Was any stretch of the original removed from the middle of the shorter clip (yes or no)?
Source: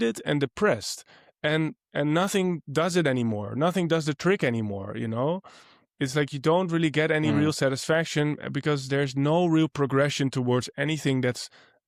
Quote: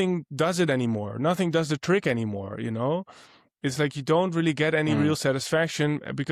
no